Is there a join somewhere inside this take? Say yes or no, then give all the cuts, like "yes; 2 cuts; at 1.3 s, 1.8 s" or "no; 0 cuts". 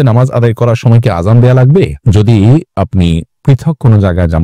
no; 0 cuts